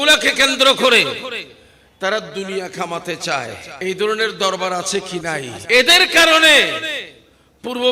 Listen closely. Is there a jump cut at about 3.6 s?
yes; 2 cuts; at 3.6 s, 5.5 s

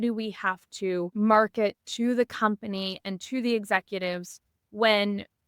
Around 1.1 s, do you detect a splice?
yes; 1 cut; at 1.1 s

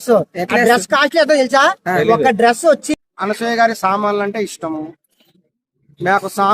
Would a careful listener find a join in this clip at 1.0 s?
no; 1 cut; at 2.9 s

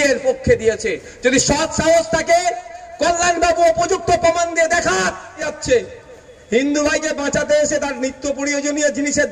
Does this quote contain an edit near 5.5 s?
yes; 1 cut; at 5.5 s

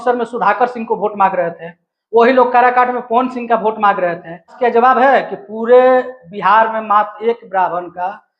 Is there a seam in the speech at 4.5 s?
yes; 1 cut; at 4.5 s

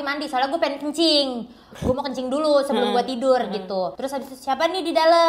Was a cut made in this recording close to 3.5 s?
no; 0 cuts

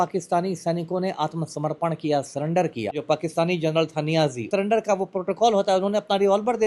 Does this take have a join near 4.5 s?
yes; 2 cuts; at 3.0 s, 4.5 s

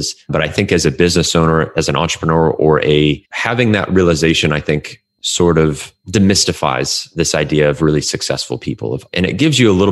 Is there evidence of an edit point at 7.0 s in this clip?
no; 1 cut; at 9.0 s

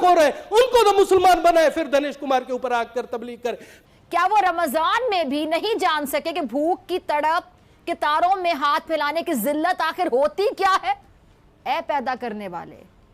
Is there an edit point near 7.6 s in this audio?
no; 1 cut; at 3.8 s

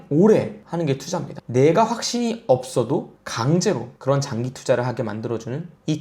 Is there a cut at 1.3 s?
yes; 1 cut; at 1.3 s

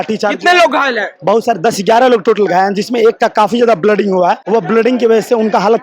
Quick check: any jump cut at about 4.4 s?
yes; 1 cut; at 4.4 s

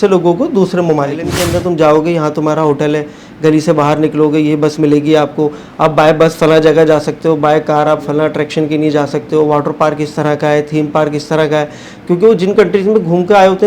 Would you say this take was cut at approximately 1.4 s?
yes; 1 cut; at 1.4 s

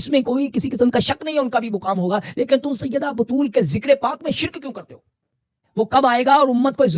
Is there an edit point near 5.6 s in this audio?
yes; 1 cut; at 5.6 s

